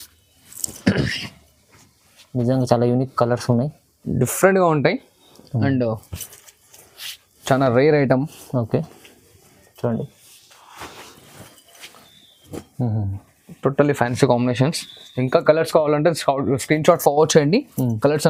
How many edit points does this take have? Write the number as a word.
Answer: zero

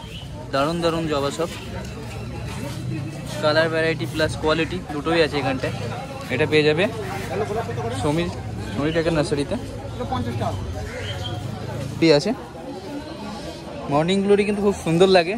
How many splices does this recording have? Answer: one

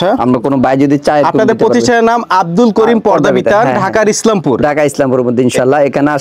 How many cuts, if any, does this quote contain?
zero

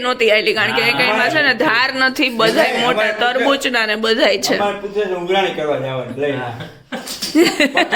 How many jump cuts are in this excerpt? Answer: zero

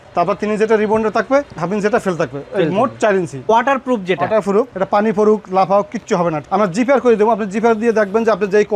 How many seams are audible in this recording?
three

